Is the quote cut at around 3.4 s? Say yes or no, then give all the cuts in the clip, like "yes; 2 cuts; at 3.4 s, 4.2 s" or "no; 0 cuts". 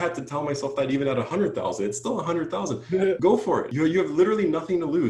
yes; 1 cut; at 3.4 s